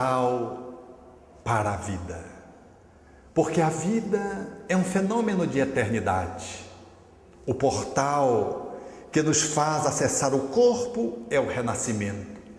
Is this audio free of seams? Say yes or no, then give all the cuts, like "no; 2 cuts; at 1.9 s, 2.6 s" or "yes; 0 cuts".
yes; 0 cuts